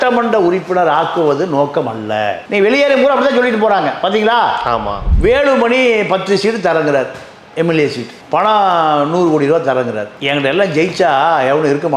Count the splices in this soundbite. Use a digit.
1